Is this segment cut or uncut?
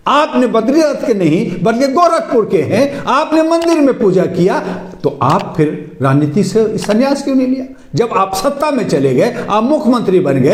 uncut